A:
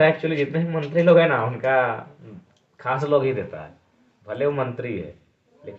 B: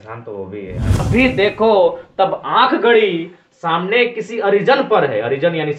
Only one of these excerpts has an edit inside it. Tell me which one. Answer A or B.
B